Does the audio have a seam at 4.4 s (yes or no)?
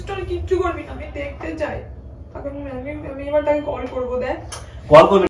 no